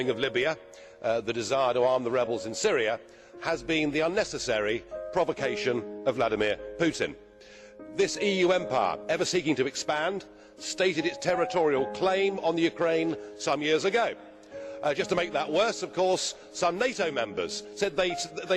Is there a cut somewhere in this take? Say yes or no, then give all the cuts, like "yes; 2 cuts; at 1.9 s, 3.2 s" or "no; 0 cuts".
yes; 1 cut; at 12.8 s